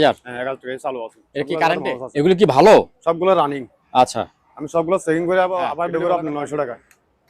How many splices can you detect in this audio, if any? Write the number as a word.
two